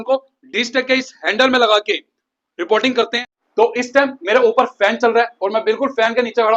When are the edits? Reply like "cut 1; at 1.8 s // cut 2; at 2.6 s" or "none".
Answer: cut 1; at 3.3 s